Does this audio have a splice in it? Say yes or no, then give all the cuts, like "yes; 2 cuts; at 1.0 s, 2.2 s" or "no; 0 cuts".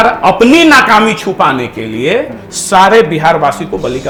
no; 0 cuts